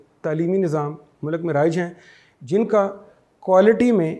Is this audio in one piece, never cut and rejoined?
no; 1 cut; at 1.1 s

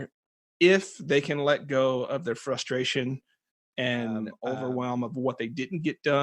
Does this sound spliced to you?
yes; 1 cut; at 4.3 s

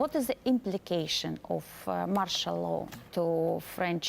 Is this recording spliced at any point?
yes; 1 cut; at 3.0 s

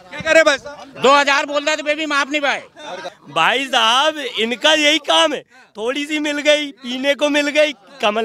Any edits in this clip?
yes; 1 cut; at 2.9 s

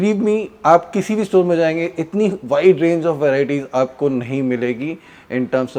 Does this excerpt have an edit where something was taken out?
no; 0 cuts

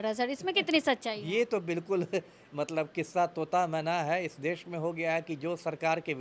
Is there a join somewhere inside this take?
no; 0 cuts

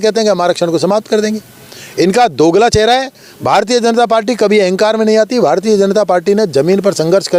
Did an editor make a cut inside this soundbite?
no; 0 cuts

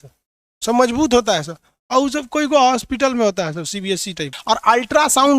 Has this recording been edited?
yes; 1 cut; at 4.3 s

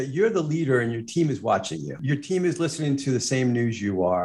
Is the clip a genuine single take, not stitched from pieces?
no; 1 cut; at 2.0 s

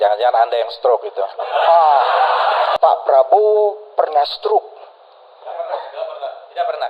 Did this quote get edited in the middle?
yes; 1 cut; at 2.7 s

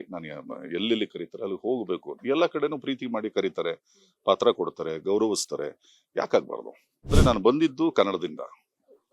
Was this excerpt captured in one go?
no; 1 cut; at 7.1 s

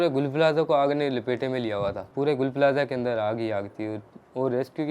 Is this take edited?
yes; 1 cut; at 2.0 s

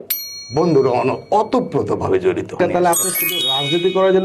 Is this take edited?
yes; 1 cut; at 2.6 s

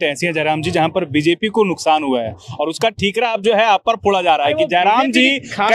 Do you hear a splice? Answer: no; 0 cuts

